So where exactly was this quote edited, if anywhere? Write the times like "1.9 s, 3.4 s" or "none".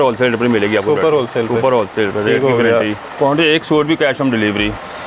3.1 s